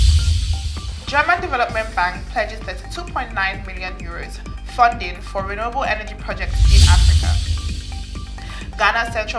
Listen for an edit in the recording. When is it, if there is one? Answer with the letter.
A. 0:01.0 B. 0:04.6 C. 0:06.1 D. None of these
A